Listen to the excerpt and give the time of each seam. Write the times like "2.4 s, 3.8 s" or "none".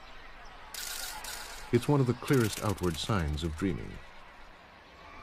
1.8 s